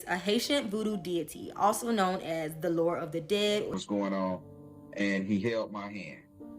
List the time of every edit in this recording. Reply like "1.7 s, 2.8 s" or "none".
3.7 s

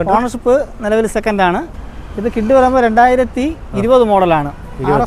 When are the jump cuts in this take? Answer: 1.8 s

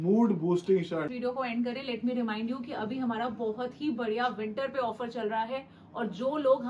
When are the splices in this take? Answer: 1.1 s

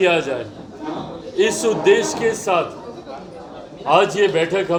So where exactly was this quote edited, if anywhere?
none

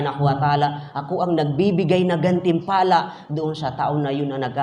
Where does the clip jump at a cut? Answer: none

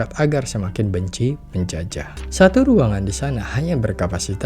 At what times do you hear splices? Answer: 2.2 s

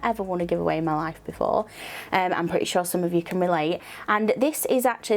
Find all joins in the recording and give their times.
none

